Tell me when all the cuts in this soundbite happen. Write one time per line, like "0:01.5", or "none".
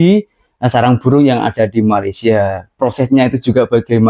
none